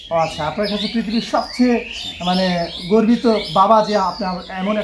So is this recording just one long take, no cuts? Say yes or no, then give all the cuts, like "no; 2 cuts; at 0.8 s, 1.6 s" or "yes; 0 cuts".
yes; 0 cuts